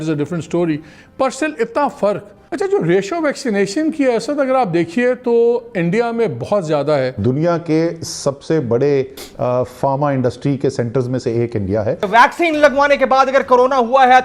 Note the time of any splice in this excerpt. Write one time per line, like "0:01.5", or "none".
0:02.5
0:07.1
0:12.1